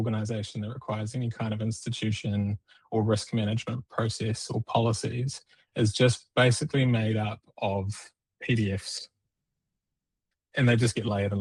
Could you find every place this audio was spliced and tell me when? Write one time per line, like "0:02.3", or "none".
none

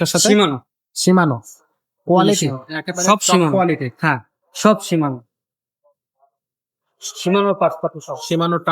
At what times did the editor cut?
none

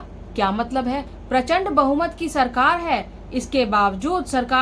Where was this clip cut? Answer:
0:01.1

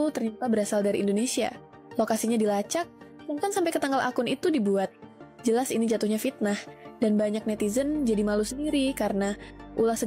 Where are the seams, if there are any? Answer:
none

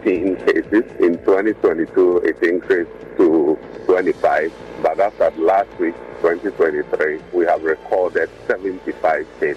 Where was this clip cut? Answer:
0:00.9
0:03.0
0:03.7
0:07.2
0:08.4

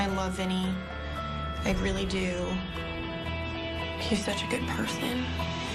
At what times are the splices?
none

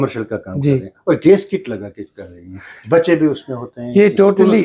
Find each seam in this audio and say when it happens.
none

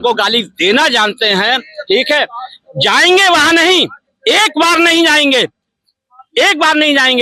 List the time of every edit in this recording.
none

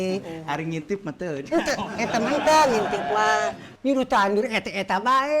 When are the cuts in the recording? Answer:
0:03.6

